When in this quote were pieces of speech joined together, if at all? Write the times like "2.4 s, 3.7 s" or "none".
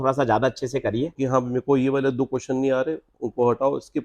1.2 s